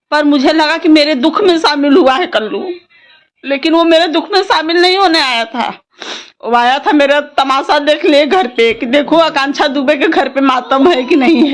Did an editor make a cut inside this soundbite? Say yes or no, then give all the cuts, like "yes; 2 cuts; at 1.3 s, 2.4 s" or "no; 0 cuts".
no; 0 cuts